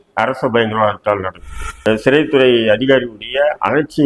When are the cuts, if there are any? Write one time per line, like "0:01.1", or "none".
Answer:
0:01.6